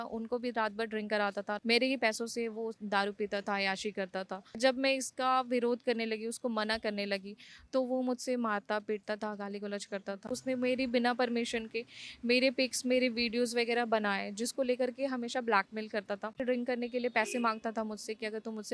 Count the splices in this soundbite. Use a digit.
4